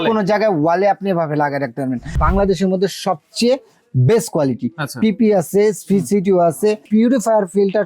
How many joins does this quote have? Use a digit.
2